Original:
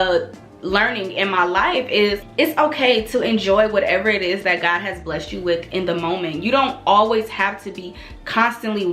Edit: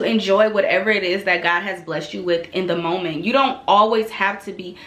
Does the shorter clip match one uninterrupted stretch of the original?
yes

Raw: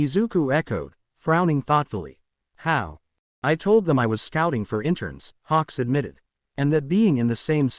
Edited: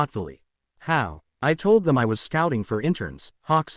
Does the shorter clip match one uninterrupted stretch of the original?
no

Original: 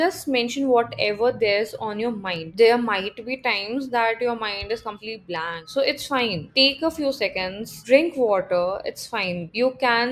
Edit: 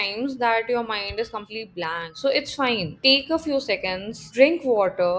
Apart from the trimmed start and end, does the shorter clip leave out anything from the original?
no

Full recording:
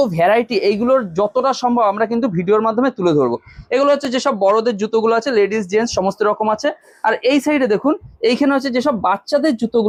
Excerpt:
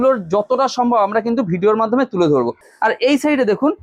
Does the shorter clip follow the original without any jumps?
no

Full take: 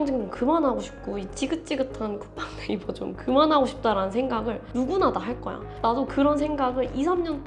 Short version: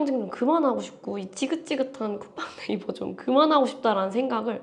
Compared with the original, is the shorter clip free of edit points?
yes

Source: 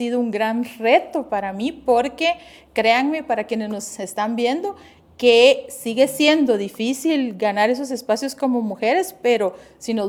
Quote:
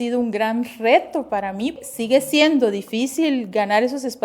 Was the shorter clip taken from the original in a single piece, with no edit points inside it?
no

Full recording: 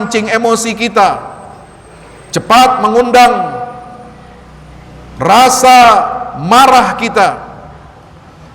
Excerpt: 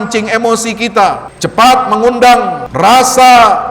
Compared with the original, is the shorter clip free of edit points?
no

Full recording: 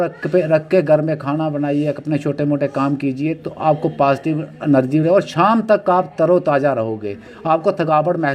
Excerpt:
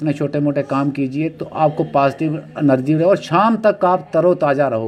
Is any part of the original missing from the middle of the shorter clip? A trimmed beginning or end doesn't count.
no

